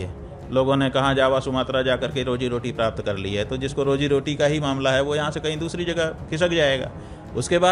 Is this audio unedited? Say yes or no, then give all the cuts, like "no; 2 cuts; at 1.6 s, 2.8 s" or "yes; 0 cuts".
yes; 0 cuts